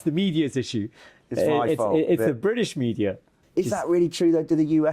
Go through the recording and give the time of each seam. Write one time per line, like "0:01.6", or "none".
0:03.4